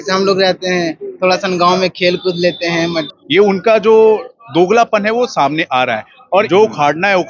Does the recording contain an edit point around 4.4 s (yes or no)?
no